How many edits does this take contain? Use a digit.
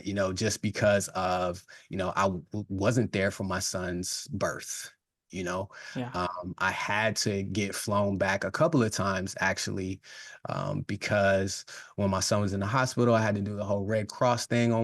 0